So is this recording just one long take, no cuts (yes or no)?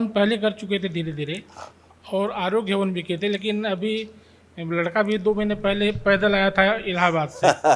yes